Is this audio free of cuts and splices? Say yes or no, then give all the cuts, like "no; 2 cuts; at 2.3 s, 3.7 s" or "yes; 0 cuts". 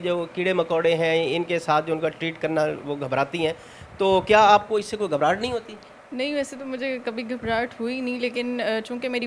yes; 0 cuts